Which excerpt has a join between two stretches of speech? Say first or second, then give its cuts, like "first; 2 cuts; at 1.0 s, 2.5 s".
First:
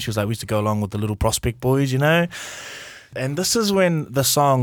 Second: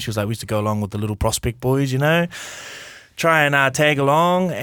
first; 1 cut; at 3.1 s